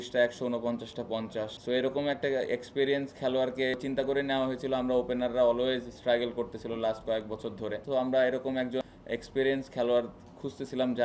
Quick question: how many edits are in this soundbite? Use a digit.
4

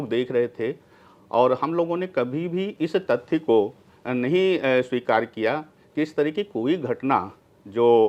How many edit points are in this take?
0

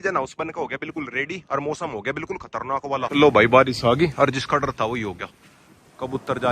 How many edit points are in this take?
1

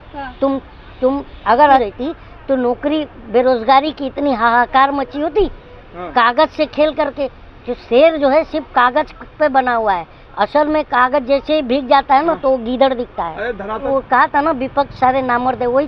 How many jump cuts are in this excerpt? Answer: 2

